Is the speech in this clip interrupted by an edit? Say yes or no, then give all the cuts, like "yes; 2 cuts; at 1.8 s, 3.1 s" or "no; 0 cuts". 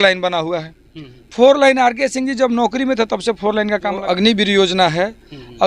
yes; 1 cut; at 4.0 s